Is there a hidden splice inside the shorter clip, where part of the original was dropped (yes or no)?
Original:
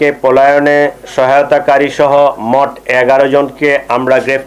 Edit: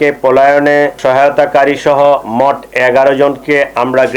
yes